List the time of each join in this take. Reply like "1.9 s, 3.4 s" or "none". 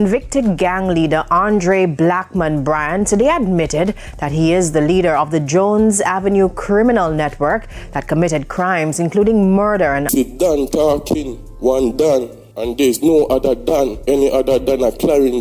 10.1 s